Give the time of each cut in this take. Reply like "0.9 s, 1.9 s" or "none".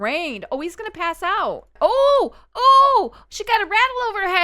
1.7 s